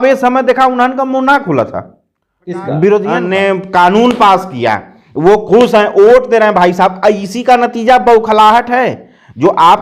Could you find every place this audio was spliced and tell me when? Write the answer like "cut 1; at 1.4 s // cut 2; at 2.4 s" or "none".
cut 1; at 3.2 s